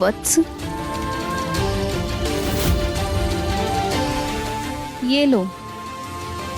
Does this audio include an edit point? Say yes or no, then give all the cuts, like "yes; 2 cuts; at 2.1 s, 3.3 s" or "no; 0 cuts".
yes; 2 cuts; at 1.1 s, 3.6 s